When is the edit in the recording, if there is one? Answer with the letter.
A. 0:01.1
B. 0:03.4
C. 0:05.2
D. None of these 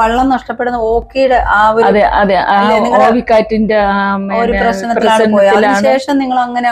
D